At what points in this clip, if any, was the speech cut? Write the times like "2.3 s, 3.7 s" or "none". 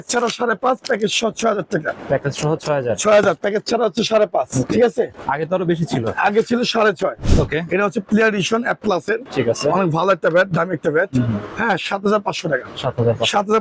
7.2 s